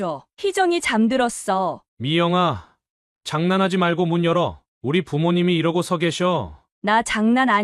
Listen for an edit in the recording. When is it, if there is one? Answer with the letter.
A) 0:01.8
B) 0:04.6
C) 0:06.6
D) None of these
A